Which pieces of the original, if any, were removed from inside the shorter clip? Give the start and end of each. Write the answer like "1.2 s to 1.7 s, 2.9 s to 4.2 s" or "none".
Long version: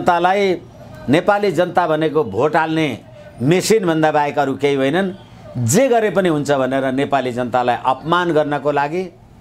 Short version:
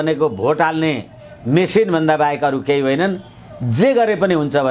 none